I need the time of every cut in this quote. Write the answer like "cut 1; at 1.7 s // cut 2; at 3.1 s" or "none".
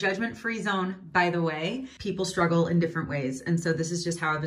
none